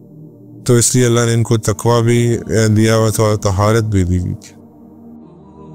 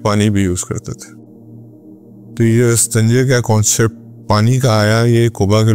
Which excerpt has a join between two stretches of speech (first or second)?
first